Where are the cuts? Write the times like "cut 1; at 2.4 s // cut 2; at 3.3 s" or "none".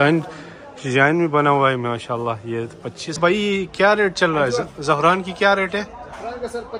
cut 1; at 3.1 s